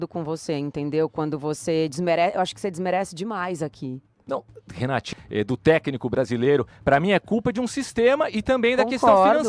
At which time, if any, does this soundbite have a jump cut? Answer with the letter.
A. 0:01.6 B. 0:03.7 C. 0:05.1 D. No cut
C